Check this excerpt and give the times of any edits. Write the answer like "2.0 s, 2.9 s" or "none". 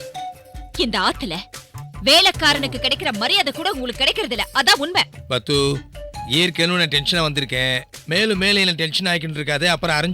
none